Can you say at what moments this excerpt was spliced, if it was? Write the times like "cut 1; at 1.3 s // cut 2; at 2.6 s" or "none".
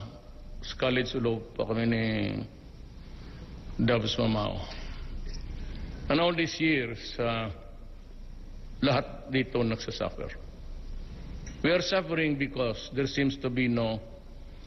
cut 1; at 6.7 s